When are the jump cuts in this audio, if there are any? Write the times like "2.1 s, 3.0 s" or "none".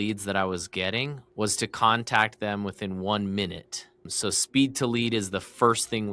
1.2 s, 4.1 s